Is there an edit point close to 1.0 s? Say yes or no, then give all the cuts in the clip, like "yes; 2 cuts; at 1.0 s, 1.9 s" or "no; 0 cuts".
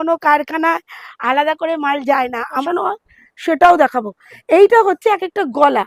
no; 1 cut; at 2.6 s